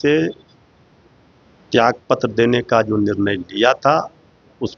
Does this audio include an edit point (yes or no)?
no